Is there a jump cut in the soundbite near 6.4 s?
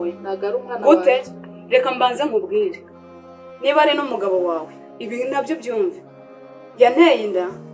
no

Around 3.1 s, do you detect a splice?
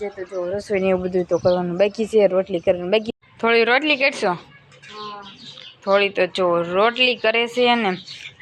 yes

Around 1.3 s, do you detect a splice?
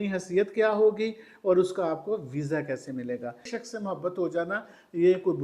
no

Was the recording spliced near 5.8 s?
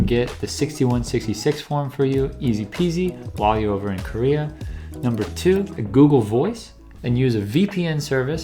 yes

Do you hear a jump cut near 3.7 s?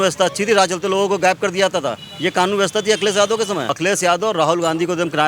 yes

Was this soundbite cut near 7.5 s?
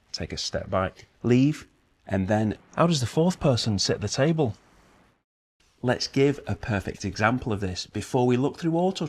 no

